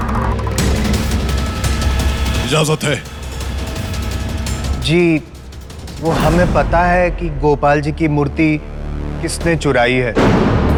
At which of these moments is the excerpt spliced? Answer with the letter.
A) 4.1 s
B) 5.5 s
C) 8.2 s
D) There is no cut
D